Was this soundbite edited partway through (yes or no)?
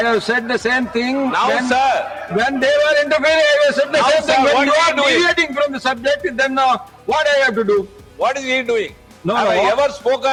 no